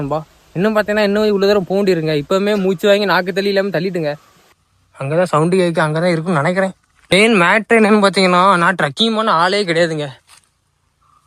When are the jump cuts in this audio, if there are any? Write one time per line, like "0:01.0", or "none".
0:04.4
0:07.1

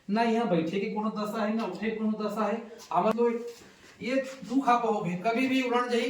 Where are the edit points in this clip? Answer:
0:03.1

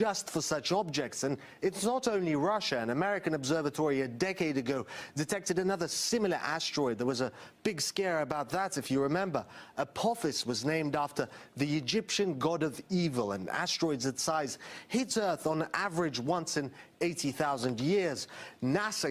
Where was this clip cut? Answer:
none

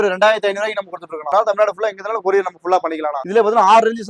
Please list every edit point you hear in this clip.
0:01.3
0:03.1

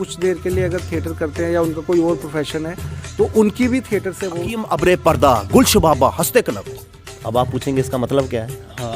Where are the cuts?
0:04.6

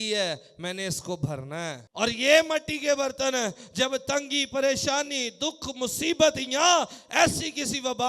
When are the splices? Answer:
0:01.8

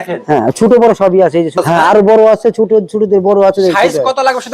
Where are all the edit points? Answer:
0:01.6

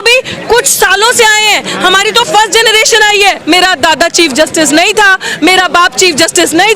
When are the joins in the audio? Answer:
0:03.4

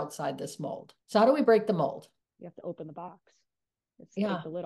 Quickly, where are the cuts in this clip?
0:00.9
0:02.2

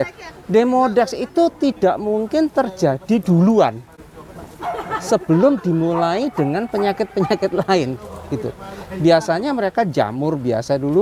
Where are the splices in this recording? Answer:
none

